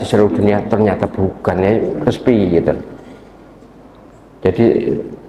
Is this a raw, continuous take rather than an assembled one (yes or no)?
yes